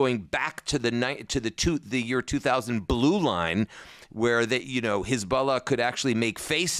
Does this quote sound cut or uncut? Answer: uncut